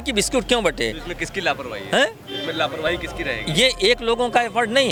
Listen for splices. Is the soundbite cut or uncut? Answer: uncut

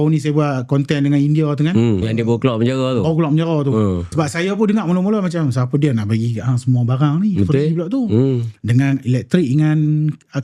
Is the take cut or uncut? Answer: cut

